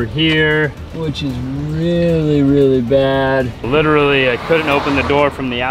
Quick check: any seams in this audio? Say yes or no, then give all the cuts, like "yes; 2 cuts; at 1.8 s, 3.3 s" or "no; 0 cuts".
yes; 1 cut; at 3.7 s